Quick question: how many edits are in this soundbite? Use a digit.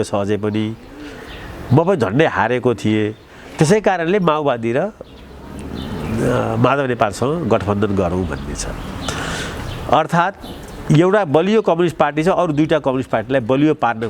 0